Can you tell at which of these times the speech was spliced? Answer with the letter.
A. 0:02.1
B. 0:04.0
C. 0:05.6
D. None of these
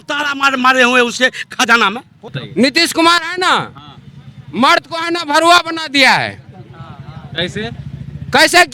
A